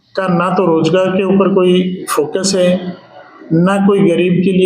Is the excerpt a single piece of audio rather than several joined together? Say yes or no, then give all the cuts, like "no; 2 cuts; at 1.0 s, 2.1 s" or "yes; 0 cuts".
yes; 0 cuts